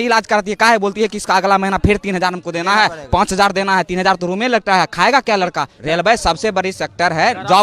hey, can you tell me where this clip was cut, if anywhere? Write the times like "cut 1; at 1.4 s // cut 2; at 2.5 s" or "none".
cut 1; at 5.7 s